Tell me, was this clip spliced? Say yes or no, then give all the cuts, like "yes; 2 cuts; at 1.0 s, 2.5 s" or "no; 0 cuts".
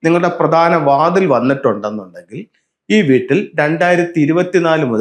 no; 0 cuts